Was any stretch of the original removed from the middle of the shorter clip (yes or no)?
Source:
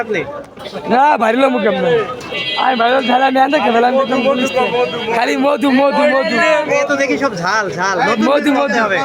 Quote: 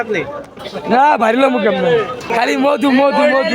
yes